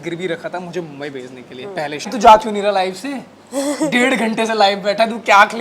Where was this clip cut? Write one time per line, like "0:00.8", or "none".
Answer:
0:02.1